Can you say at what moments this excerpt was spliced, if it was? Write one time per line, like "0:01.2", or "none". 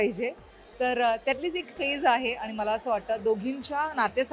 none